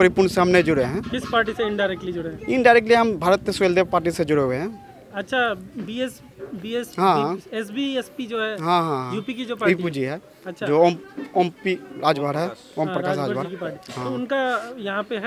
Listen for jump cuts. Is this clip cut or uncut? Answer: uncut